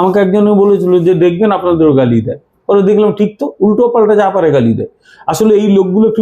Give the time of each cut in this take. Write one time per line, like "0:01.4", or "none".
none